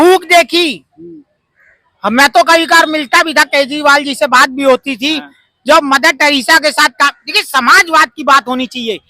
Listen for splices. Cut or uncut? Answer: uncut